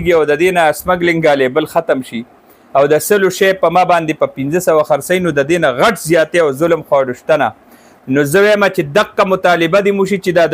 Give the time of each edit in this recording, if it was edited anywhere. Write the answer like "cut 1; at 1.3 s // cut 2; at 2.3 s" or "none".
none